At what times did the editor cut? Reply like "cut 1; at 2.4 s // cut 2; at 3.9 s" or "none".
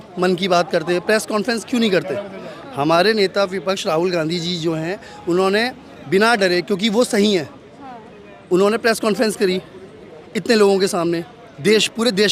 none